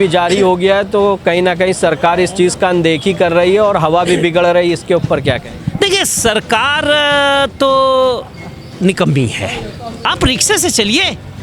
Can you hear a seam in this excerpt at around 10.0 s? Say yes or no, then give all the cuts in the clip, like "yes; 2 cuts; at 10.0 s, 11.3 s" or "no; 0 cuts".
yes; 1 cut; at 10.0 s